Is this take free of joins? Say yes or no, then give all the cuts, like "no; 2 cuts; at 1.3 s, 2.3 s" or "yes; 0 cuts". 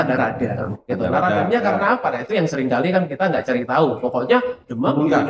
yes; 0 cuts